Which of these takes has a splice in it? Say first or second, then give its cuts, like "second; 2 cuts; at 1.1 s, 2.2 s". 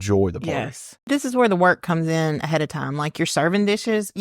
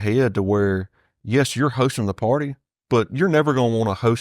first; 1 cut; at 1.0 s